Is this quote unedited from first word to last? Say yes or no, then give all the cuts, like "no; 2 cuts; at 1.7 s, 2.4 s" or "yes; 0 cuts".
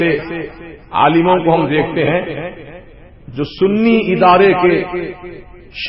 yes; 0 cuts